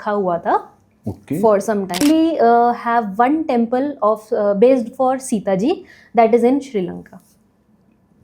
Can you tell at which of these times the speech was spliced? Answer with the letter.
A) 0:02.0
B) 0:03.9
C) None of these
A